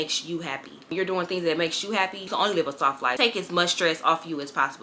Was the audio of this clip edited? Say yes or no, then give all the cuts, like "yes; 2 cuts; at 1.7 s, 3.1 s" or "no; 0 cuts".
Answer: yes; 2 cuts; at 2.2 s, 3.1 s